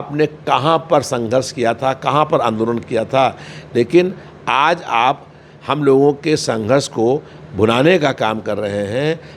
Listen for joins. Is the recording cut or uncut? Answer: uncut